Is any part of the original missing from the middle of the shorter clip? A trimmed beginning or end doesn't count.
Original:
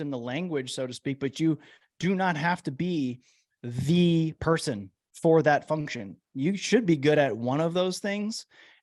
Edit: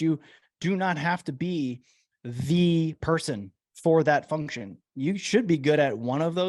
no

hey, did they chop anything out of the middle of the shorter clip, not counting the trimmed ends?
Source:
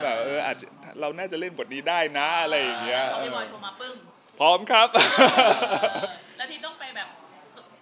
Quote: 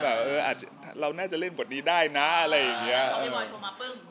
no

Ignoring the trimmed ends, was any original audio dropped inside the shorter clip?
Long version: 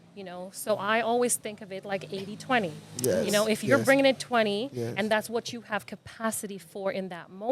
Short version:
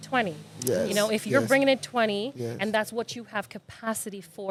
no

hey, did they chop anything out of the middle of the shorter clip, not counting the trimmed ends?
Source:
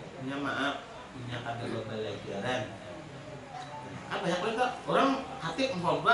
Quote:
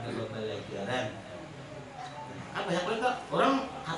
no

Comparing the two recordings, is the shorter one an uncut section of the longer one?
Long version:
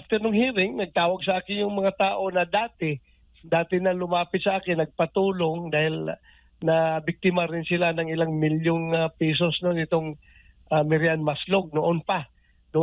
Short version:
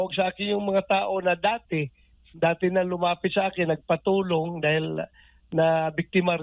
yes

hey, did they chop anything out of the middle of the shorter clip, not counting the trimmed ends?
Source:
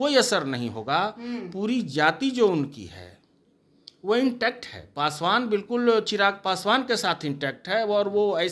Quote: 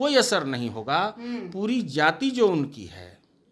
no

